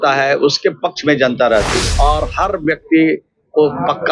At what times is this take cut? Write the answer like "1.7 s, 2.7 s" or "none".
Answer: 1.8 s